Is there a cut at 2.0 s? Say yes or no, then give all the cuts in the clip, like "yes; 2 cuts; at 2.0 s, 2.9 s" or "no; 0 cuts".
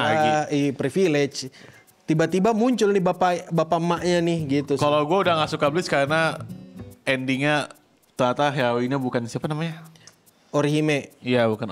no; 0 cuts